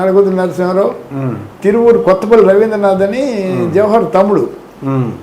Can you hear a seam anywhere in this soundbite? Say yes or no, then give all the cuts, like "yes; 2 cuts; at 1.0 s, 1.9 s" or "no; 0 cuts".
no; 0 cuts